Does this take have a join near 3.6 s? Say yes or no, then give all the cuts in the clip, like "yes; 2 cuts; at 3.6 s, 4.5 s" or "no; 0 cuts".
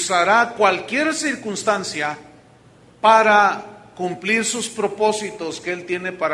no; 0 cuts